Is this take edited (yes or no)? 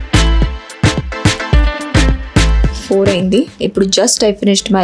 yes